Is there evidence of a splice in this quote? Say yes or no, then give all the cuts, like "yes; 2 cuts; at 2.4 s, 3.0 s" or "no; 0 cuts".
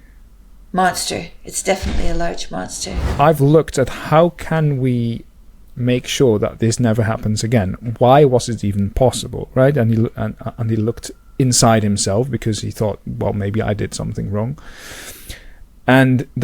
yes; 1 cut; at 2.9 s